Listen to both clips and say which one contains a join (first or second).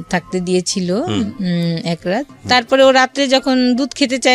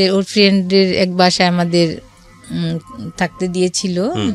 first